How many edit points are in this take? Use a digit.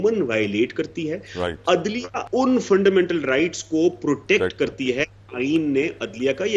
1